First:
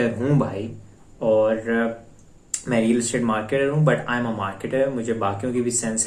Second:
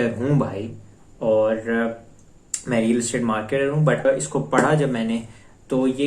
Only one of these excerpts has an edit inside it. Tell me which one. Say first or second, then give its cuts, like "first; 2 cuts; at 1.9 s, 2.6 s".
second; 1 cut; at 4.0 s